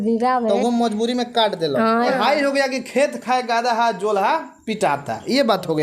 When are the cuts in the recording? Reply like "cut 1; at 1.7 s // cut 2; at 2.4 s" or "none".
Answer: cut 1; at 2.1 s